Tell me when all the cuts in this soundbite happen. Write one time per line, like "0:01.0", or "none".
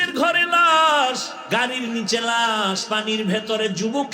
0:01.3